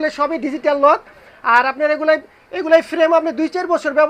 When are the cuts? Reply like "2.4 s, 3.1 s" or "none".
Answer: none